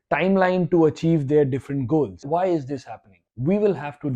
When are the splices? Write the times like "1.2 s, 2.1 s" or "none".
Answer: 2.6 s